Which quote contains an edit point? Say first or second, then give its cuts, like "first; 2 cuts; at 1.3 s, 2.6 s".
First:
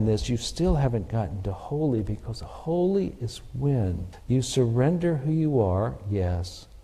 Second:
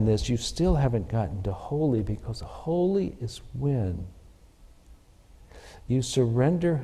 first; 1 cut; at 4.1 s